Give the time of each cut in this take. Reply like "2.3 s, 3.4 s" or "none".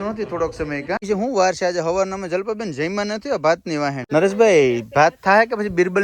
1.0 s, 4.0 s